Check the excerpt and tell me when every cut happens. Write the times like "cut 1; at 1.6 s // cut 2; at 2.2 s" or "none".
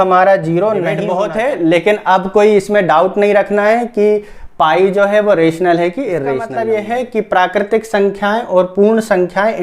cut 1; at 1.0 s // cut 2; at 6.5 s